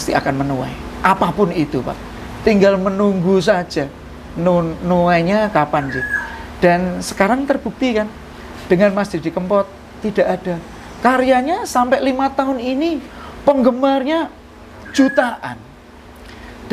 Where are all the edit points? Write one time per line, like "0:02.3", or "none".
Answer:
none